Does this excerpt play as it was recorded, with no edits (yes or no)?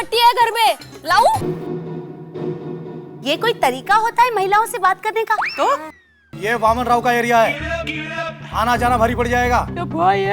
no